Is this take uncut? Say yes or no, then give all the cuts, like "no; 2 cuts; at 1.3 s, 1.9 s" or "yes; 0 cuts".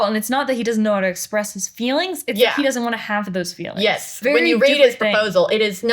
no; 1 cut; at 4.2 s